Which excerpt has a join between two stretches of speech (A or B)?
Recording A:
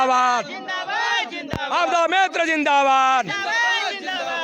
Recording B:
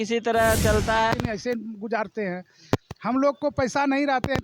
B